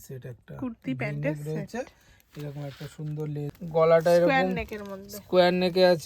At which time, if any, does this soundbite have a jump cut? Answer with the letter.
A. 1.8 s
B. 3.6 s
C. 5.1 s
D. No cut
B